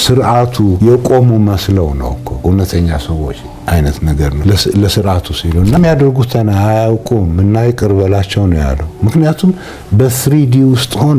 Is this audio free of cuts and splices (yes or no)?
no